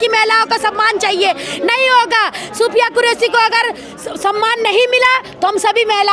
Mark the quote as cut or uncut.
uncut